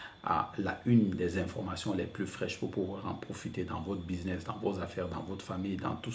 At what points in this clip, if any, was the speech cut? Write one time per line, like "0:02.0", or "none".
none